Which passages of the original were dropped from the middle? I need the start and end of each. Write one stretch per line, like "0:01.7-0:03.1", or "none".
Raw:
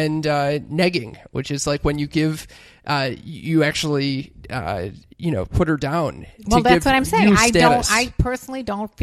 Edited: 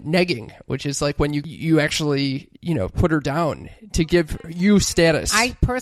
0:02.1-0:03.3
0:04.3-0:05.1